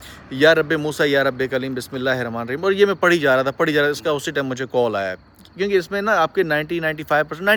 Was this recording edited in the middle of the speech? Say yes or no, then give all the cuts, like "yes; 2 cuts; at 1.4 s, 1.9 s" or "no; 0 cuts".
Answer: no; 0 cuts